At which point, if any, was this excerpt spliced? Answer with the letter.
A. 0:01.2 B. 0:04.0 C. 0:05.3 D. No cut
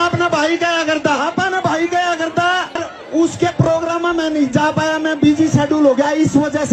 D